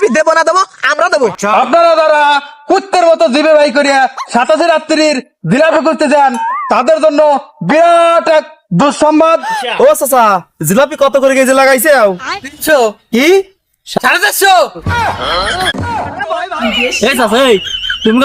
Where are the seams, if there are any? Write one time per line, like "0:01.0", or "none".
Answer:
0:01.4
0:09.6
0:16.5